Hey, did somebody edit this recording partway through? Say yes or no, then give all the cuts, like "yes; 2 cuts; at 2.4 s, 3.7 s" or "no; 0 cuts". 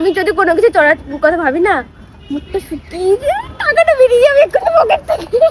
no; 0 cuts